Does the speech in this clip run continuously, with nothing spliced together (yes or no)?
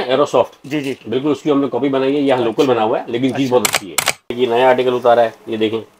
no